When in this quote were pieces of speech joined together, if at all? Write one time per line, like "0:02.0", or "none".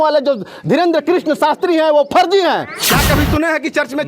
0:02.8